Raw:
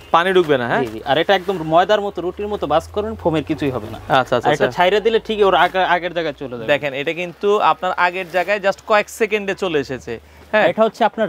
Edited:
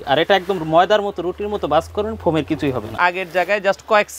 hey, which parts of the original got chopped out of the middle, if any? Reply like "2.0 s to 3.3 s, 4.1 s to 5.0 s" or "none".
3.9 s to 7.9 s